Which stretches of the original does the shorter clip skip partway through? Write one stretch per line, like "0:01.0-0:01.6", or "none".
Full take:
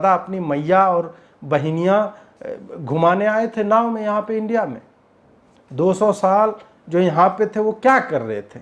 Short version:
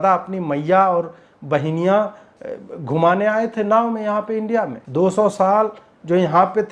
0:04.8-0:05.6

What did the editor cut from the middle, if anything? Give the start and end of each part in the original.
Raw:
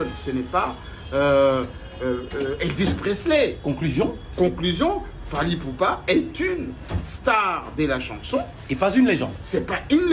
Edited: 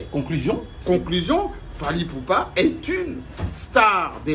none

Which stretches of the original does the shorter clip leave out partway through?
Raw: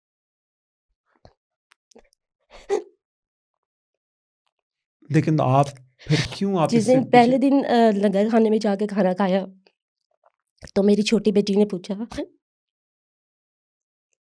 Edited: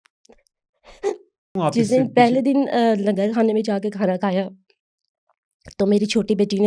0:03.2-0:06.5

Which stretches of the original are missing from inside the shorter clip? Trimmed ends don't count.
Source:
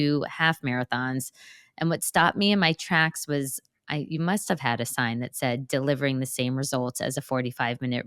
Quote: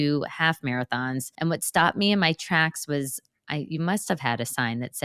0:01.3-0:01.7

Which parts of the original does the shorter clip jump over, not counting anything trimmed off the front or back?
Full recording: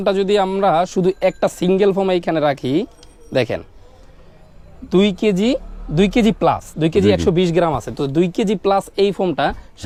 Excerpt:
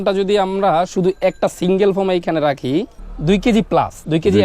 0:03.1-0:05.8

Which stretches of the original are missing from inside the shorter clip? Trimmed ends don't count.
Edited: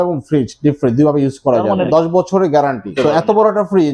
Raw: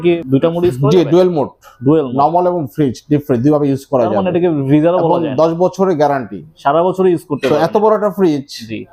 0:04.3-0:05.3
0:06.3-0:07.3

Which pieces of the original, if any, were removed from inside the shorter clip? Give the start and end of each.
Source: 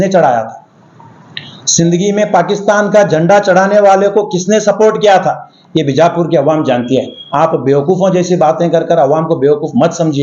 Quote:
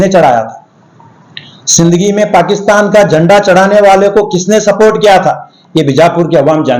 none

